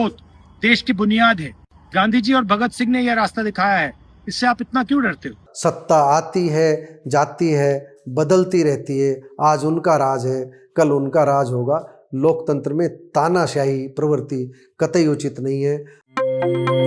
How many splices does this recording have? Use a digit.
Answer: 2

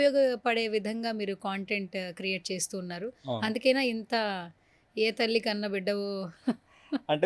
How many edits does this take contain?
0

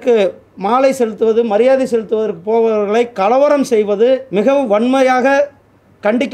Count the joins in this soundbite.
1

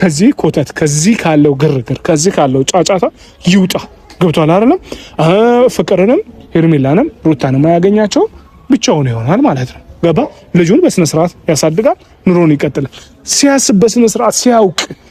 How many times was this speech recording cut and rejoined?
0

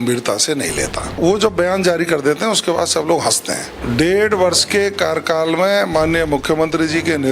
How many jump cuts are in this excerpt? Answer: 2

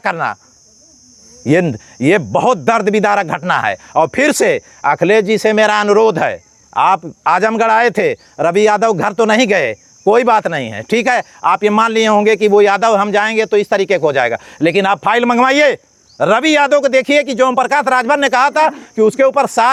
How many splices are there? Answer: 0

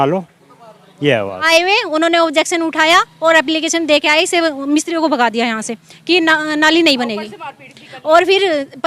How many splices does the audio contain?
1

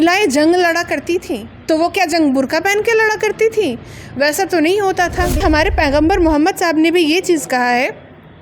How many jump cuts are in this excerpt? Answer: 1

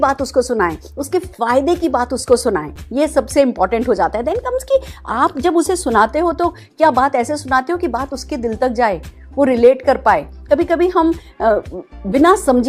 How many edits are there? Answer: 0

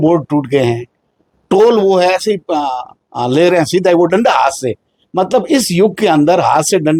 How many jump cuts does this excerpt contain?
0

